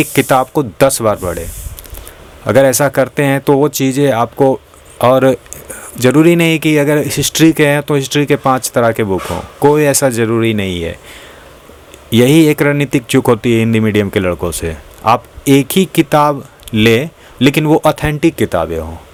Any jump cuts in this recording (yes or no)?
no